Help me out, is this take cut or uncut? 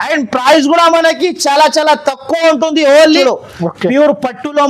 cut